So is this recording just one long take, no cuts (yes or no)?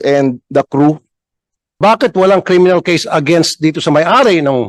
no